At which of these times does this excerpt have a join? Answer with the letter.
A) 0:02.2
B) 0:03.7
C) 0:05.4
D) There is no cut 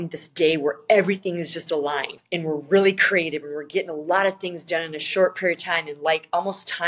A